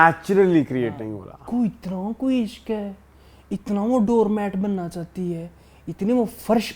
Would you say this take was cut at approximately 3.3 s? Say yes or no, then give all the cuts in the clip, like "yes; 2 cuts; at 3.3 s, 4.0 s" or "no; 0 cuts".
no; 1 cut; at 1.4 s